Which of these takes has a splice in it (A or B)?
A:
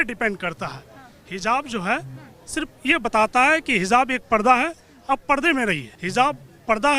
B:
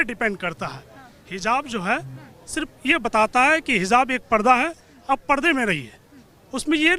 A